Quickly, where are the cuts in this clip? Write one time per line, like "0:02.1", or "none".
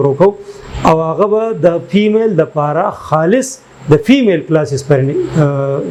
none